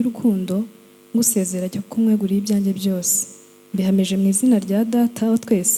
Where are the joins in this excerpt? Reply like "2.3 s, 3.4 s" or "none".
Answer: none